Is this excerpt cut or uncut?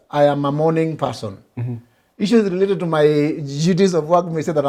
uncut